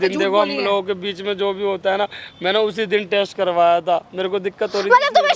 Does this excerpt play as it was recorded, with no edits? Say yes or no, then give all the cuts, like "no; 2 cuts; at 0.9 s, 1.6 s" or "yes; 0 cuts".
yes; 0 cuts